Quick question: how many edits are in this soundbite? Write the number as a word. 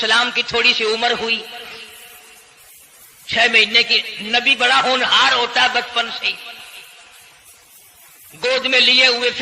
zero